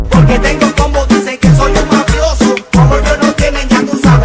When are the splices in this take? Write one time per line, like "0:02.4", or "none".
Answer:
none